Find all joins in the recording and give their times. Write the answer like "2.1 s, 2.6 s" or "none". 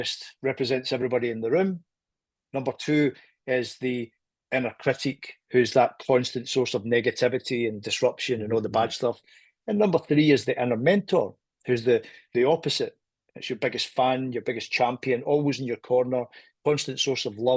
none